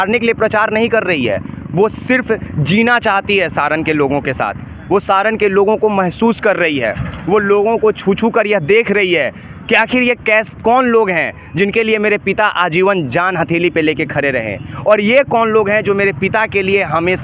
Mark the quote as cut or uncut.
uncut